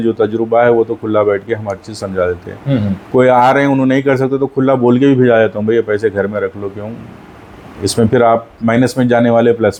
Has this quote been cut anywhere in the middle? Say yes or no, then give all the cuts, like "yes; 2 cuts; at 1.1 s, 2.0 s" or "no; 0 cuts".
no; 0 cuts